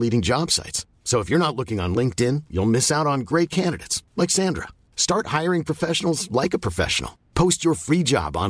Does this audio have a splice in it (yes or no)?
no